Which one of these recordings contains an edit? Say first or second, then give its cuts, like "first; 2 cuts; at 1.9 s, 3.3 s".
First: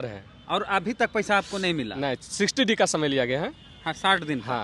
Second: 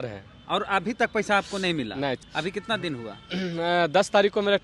second; 1 cut; at 2.3 s